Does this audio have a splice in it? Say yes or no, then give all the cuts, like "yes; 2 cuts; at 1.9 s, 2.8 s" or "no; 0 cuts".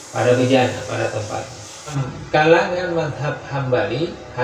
yes; 1 cut; at 2.1 s